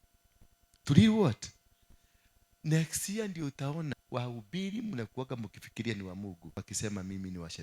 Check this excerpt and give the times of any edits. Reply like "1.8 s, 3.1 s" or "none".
4.0 s, 6.6 s